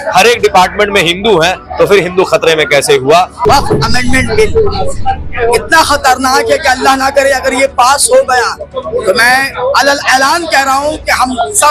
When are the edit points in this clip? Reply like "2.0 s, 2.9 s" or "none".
3.4 s